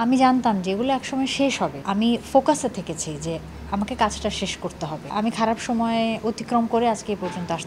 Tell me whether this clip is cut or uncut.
cut